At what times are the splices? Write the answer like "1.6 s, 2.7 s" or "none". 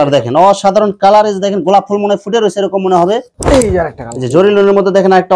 3.3 s